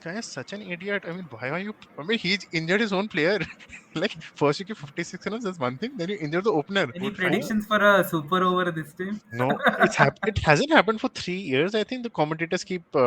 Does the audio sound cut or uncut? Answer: cut